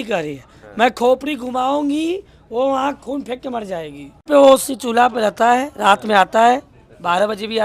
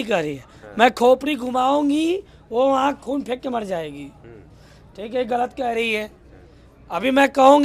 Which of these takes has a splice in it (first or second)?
first